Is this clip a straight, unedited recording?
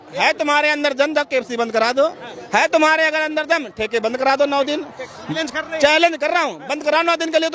no; 1 cut; at 5.2 s

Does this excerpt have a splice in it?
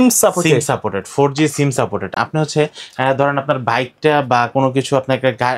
no; 0 cuts

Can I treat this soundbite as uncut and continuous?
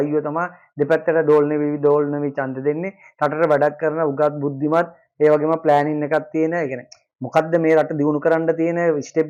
yes; 0 cuts

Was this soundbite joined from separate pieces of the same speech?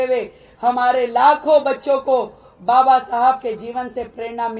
no; 0 cuts

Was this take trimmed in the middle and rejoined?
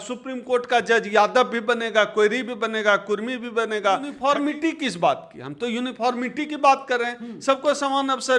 yes; 1 cut; at 4.1 s

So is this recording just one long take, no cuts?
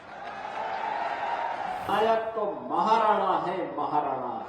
no; 1 cut; at 1.9 s

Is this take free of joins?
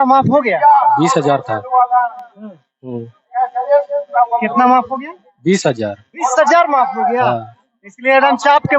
yes; 0 cuts

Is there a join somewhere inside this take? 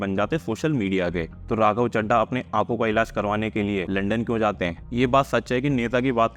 yes; 3 cuts; at 1.3 s, 3.9 s, 4.8 s

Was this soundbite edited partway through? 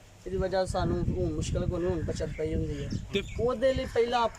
yes; 1 cut; at 3.2 s

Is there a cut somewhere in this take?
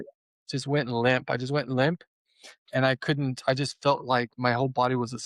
no; 0 cuts

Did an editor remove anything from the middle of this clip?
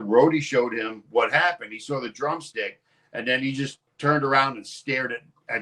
yes; 1 cut; at 3.8 s

